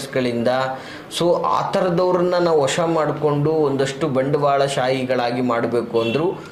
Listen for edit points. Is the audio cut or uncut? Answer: uncut